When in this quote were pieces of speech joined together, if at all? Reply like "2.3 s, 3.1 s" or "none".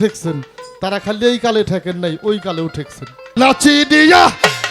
3.3 s